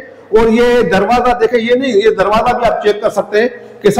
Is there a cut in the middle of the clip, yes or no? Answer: no